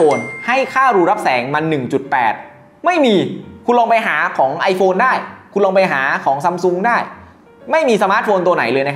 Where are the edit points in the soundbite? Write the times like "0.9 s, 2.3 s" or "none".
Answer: none